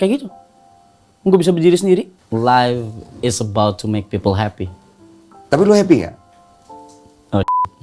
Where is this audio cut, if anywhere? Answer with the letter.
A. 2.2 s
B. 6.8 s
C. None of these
A